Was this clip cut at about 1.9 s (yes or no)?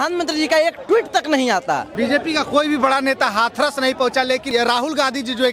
yes